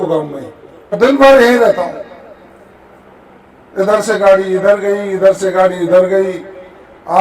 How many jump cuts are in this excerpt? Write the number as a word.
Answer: one